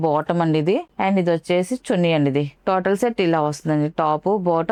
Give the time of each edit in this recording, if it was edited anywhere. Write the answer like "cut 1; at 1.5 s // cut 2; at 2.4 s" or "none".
none